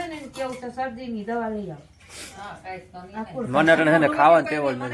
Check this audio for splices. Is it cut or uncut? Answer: uncut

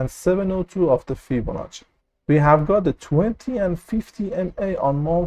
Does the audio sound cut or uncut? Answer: uncut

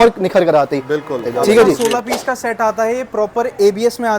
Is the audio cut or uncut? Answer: cut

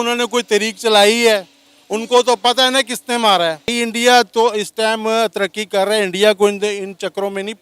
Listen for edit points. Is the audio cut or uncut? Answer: cut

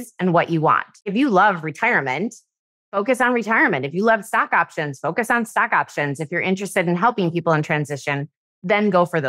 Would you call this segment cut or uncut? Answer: cut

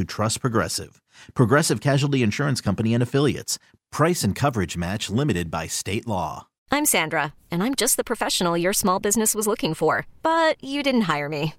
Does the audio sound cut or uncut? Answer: cut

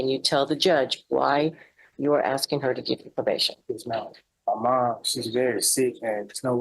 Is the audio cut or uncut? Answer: cut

